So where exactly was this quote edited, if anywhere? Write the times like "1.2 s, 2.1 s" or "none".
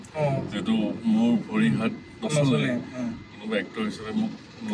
1.0 s